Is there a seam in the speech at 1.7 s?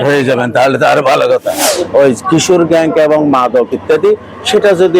yes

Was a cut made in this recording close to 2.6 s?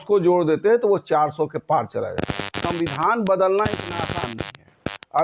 yes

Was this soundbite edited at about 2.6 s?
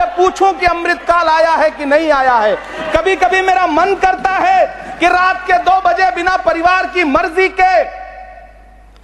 no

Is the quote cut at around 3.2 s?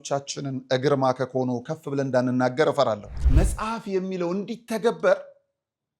yes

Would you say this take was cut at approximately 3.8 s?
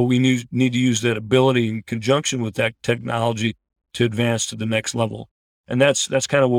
yes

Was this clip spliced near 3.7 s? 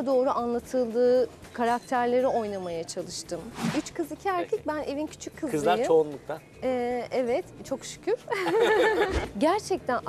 yes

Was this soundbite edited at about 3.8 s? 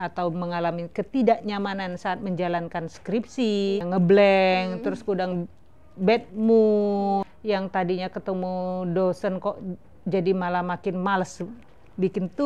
yes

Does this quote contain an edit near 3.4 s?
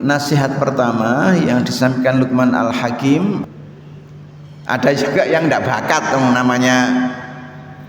yes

